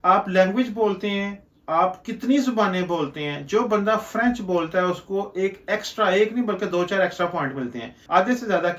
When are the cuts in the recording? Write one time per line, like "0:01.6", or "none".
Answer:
none